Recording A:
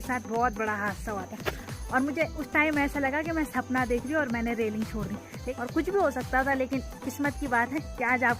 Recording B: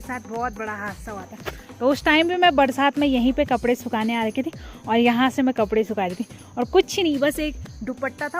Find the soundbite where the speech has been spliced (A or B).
A